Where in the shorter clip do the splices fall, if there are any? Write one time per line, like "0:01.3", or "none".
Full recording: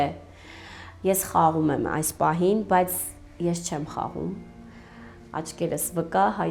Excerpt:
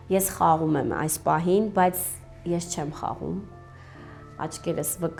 none

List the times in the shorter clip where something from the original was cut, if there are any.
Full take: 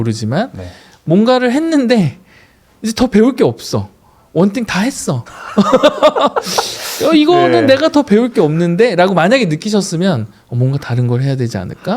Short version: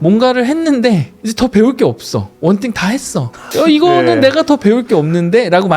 0:01.2
0:02.3
0:03.4

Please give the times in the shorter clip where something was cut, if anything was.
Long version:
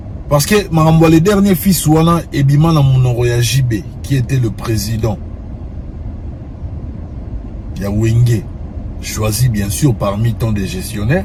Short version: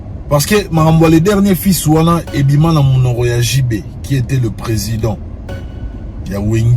0:05.7

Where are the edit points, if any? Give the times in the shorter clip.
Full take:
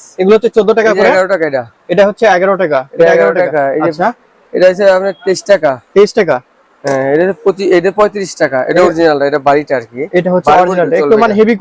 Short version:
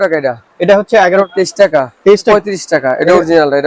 0:01.3
0:02.3

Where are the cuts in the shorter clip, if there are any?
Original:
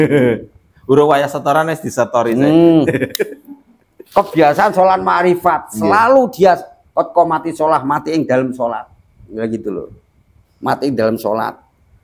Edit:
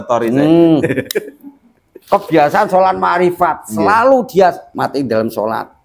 0:04.7

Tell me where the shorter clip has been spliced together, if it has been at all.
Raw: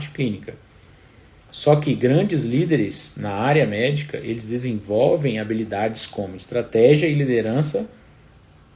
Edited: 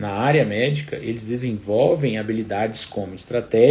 none

